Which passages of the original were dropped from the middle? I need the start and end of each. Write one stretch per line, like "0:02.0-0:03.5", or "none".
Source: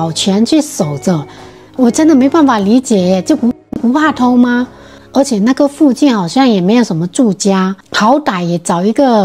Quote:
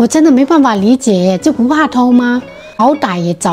0:03.5-0:03.9
0:04.9-0:07.9